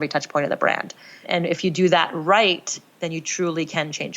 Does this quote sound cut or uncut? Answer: cut